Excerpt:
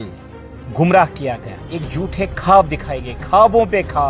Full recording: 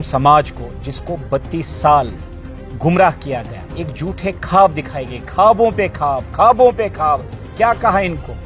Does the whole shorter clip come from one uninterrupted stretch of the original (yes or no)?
yes